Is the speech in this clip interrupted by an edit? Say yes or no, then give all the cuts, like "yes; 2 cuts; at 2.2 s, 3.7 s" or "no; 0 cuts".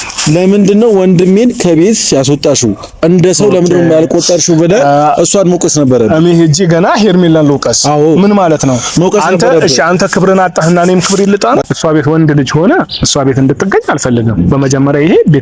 yes; 1 cut; at 11.6 s